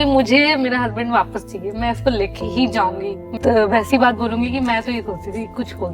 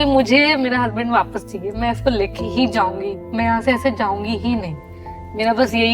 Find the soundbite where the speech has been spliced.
first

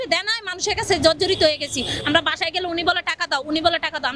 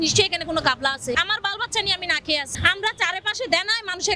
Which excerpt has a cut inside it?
second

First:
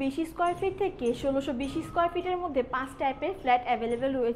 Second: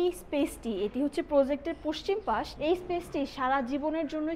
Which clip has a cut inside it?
second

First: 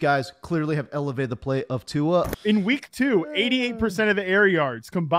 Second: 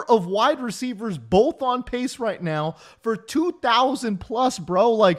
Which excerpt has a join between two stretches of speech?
first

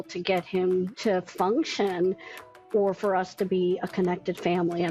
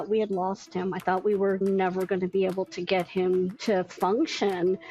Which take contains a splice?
second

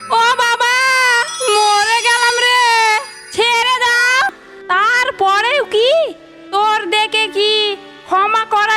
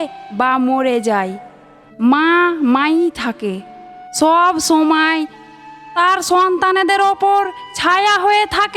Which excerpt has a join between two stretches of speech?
first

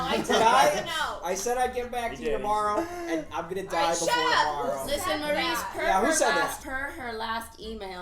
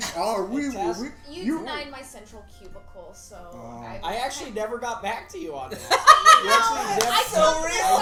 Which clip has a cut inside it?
first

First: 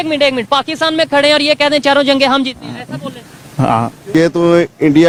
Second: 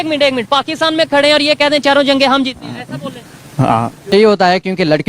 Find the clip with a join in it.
second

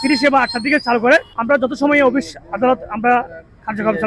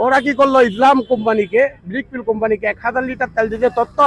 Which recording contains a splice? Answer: first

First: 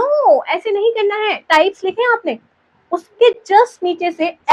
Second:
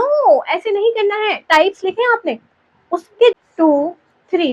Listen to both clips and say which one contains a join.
second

